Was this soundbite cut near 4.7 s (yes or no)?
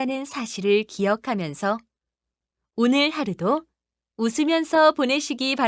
no